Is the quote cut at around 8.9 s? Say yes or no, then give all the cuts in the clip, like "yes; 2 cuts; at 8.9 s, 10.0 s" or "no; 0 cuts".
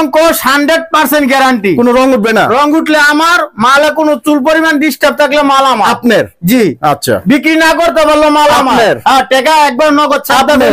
no; 0 cuts